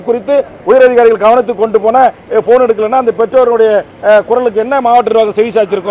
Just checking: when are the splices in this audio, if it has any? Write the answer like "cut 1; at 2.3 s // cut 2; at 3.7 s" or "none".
none